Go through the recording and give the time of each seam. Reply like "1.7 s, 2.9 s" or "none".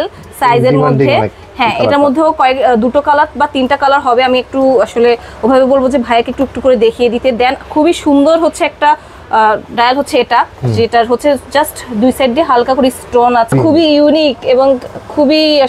13.5 s